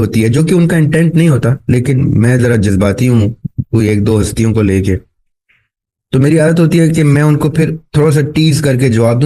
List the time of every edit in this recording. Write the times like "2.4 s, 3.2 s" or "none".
none